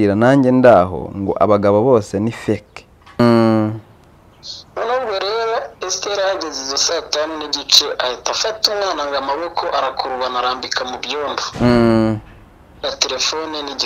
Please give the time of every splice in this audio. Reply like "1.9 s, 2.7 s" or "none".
3.2 s